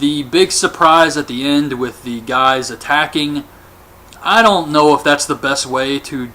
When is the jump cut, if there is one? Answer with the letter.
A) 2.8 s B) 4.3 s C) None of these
B